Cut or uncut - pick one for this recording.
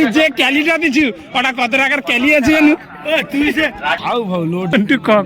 cut